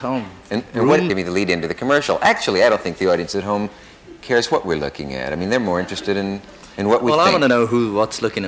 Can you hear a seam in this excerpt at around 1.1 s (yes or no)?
yes